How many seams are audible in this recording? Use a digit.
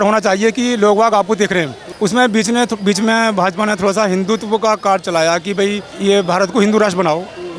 2